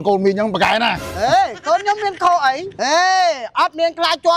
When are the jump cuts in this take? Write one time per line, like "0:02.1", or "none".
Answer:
0:02.7